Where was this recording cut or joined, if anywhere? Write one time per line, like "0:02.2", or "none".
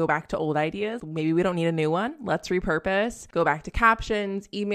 0:01.0
0:03.2